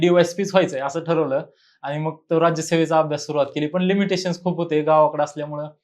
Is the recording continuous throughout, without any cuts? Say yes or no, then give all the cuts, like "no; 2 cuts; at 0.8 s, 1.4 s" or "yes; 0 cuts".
yes; 0 cuts